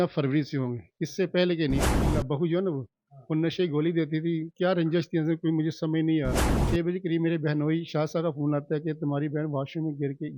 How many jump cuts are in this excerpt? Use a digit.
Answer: 2